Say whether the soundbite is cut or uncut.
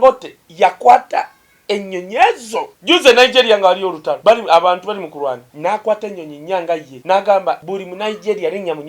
cut